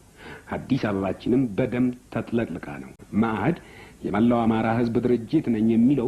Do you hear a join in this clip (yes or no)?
yes